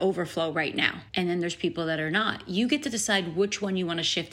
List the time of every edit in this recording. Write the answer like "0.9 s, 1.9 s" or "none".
1.0 s